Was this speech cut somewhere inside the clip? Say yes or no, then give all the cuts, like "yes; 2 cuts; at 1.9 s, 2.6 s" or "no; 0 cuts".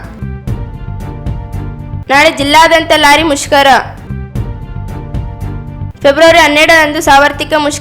yes; 2 cuts; at 4.0 s, 5.6 s